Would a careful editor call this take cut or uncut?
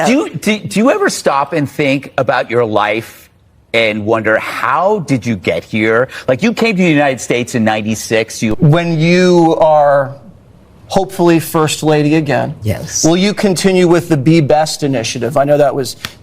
cut